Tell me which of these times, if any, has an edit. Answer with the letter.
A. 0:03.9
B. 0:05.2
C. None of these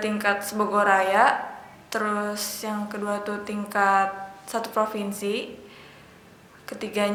C